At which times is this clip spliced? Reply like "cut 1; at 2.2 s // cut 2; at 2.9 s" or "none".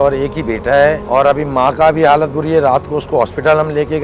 cut 1; at 1.0 s